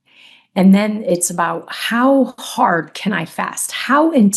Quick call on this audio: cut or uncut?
uncut